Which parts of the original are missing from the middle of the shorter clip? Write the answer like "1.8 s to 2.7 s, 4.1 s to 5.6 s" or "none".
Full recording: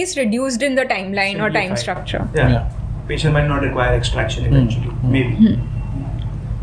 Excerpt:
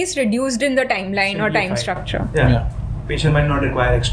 none

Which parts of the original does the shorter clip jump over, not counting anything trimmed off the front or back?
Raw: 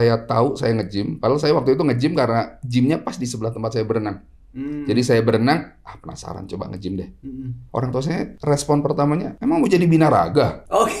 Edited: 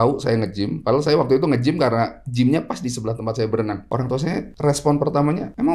4.2 s to 7.7 s

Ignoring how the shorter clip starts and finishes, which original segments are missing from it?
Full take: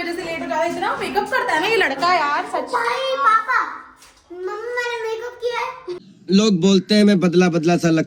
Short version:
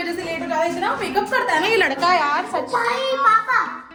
none

